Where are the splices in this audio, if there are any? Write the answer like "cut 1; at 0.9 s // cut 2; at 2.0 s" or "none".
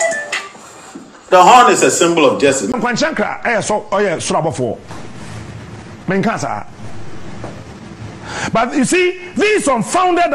cut 1; at 2.7 s